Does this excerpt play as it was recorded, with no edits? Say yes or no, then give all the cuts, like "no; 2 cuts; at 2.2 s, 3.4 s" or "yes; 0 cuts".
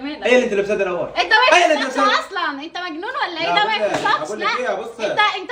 yes; 0 cuts